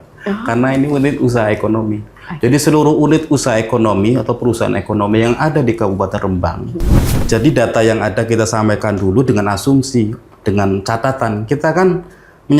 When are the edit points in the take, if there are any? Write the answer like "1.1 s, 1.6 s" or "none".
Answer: 7.1 s

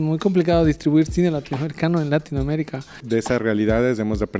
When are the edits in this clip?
3.0 s

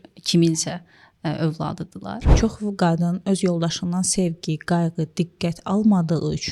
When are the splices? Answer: 2.3 s

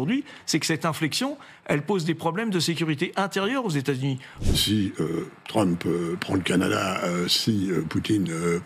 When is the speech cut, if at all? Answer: 4.3 s

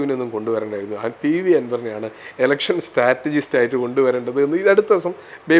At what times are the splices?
none

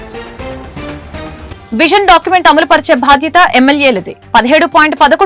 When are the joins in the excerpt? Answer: 1.5 s

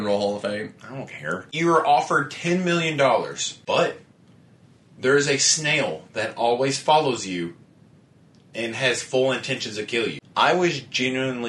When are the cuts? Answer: 1.5 s, 3.5 s, 10.2 s

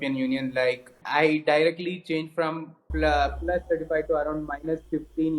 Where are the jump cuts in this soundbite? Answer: 1.0 s

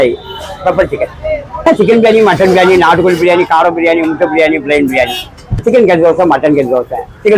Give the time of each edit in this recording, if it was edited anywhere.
1.7 s, 5.6 s

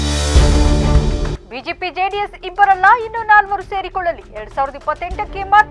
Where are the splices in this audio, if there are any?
1.4 s

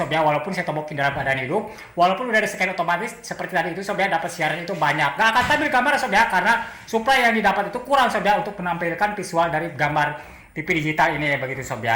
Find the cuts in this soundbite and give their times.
none

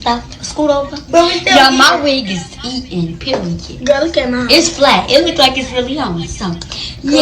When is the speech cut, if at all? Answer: 4.1 s

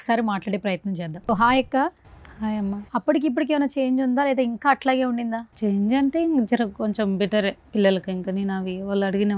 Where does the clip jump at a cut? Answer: 1.3 s, 2.8 s, 5.5 s

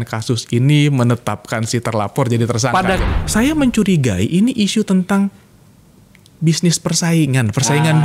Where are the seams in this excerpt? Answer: 3.1 s

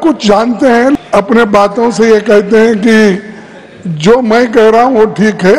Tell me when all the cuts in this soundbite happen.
1.0 s

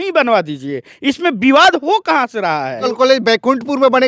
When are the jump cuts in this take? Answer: 2.9 s

